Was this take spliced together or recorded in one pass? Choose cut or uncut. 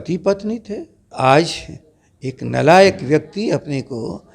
cut